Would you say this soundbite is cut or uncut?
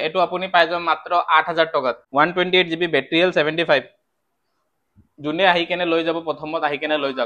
cut